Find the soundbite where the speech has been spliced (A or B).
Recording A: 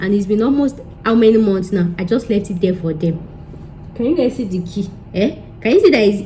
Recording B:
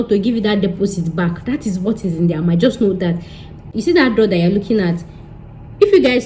B